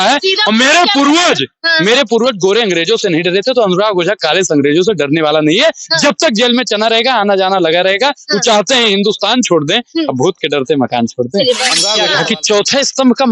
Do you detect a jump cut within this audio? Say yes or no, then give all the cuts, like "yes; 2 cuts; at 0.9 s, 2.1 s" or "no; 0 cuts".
yes; 1 cut; at 12.0 s